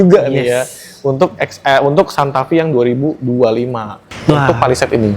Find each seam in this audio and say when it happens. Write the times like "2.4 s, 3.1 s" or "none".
4.1 s